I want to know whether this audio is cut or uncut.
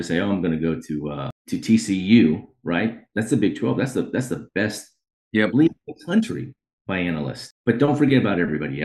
cut